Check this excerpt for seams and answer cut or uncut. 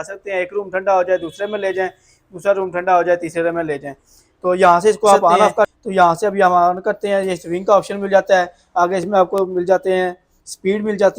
cut